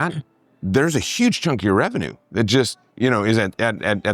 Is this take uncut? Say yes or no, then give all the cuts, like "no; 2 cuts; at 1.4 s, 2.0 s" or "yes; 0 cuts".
yes; 0 cuts